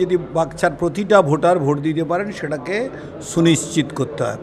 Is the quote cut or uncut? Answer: uncut